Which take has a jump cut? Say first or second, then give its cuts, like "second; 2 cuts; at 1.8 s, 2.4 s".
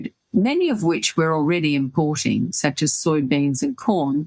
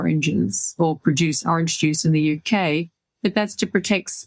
second; 1 cut; at 3.0 s